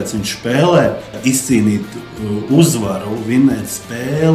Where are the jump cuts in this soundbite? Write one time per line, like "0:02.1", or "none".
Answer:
0:01.2